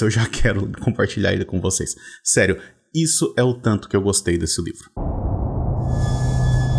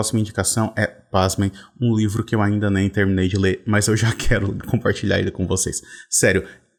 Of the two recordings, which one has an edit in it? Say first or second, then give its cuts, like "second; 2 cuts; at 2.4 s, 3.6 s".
first; 1 cut; at 4.8 s